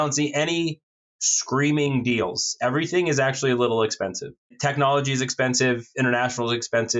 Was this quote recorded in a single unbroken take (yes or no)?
no